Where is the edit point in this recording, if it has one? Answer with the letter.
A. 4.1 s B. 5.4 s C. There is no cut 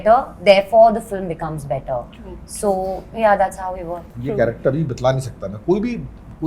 A